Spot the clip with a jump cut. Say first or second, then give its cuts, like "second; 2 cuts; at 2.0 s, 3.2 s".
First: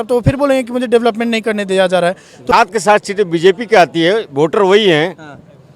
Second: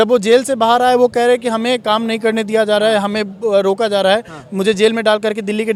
first; 1 cut; at 2.5 s